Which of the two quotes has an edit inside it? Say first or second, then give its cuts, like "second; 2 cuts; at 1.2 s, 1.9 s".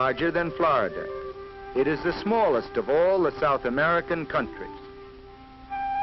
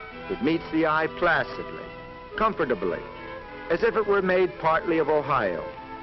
first; 1 cut; at 4.0 s